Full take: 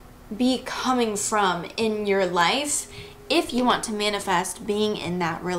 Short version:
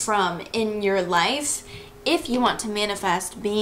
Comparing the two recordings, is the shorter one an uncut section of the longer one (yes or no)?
yes